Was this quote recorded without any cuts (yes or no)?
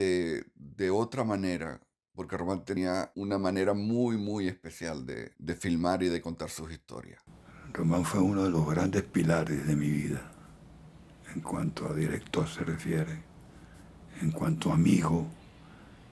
no